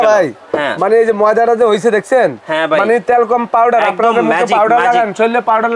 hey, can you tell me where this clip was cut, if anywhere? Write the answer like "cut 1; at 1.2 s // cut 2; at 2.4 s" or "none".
none